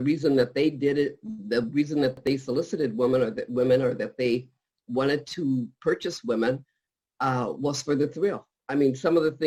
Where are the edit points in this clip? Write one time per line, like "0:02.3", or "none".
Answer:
none